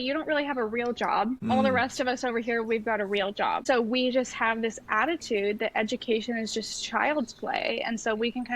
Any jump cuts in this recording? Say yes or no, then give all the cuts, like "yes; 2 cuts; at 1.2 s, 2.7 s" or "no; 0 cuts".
yes; 2 cuts; at 1.5 s, 3.6 s